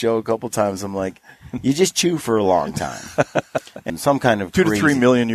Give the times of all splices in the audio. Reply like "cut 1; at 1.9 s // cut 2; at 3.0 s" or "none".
cut 1; at 3.8 s